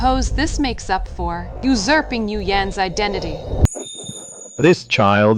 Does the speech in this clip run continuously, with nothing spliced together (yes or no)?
no